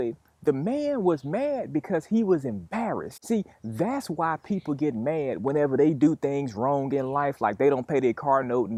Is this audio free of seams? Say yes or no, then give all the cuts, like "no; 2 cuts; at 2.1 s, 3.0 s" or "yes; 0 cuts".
yes; 0 cuts